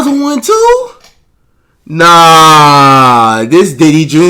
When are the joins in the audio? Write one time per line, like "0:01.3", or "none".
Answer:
none